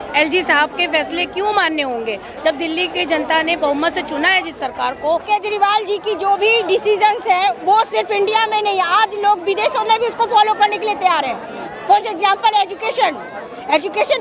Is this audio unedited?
no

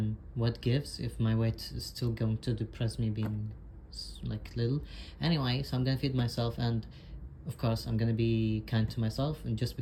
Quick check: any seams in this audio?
no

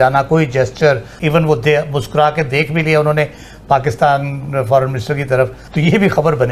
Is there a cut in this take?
yes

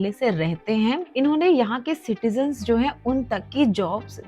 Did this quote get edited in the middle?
yes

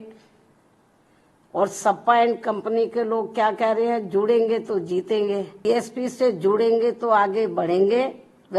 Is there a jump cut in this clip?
yes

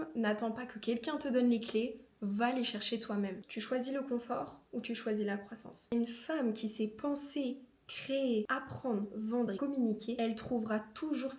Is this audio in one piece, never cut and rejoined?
no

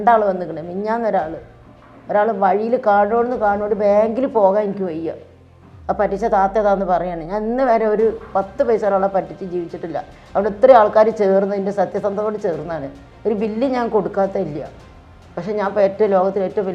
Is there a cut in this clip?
no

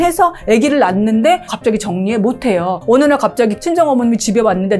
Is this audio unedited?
no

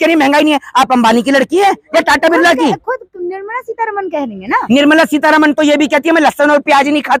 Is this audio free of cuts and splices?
yes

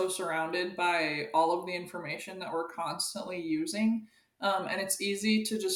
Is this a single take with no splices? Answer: yes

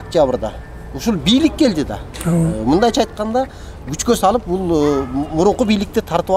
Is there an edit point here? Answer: no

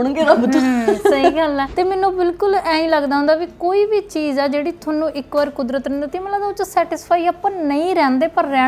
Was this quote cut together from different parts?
yes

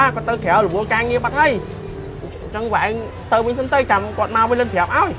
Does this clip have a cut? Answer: no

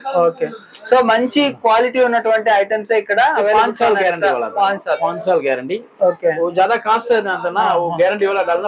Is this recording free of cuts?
yes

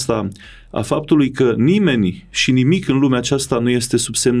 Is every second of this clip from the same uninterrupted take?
yes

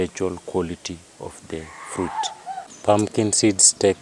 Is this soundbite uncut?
no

